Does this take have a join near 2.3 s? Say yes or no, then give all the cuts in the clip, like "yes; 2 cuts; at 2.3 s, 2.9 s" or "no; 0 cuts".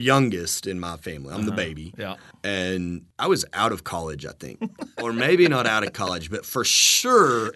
yes; 3 cuts; at 2.3 s, 3.1 s, 4.9 s